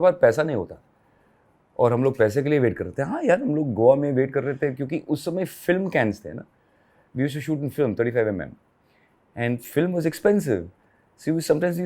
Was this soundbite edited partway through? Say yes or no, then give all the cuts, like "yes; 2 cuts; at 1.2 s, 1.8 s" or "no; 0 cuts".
no; 0 cuts